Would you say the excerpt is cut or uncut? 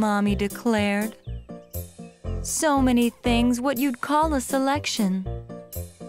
uncut